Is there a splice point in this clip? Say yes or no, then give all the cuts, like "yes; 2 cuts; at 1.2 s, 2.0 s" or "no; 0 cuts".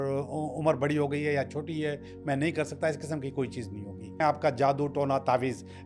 yes; 1 cut; at 4.2 s